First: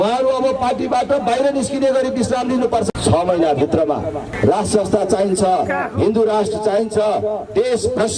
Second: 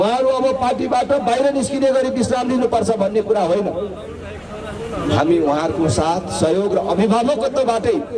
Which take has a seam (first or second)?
first